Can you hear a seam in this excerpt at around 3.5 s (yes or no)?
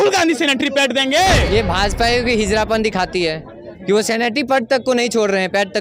no